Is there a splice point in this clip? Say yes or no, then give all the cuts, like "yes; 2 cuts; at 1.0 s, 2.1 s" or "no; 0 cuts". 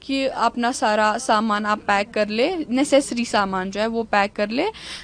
no; 0 cuts